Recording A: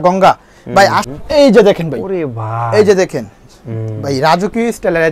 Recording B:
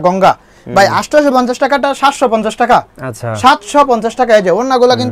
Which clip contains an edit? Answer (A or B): A